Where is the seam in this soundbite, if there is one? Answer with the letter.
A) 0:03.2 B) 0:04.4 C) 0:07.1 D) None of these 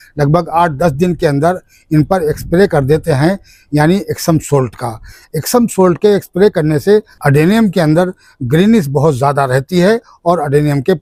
D